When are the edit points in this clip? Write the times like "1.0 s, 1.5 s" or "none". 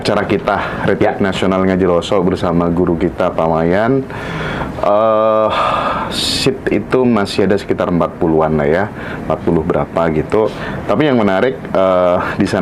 none